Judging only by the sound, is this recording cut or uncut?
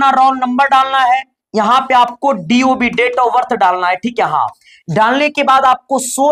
uncut